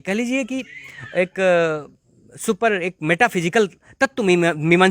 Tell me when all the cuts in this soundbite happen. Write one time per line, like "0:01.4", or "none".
none